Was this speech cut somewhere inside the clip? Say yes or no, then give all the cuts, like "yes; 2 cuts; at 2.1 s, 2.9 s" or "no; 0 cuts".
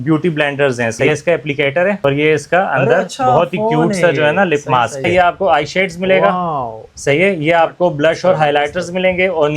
yes; 3 cuts; at 1.0 s, 2.0 s, 5.1 s